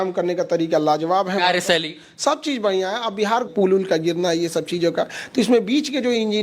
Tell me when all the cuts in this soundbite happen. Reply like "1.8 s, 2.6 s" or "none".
3.5 s